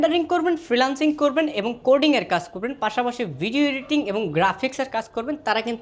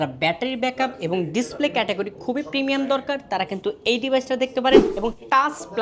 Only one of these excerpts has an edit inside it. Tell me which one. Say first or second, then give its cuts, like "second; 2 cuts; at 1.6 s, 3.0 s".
second; 1 cut; at 4.9 s